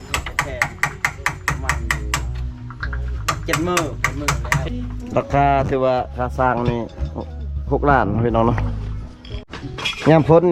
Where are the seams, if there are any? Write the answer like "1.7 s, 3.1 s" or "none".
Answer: 4.6 s, 9.5 s